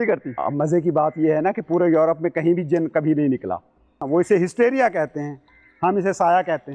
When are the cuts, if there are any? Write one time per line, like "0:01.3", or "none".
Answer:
0:04.0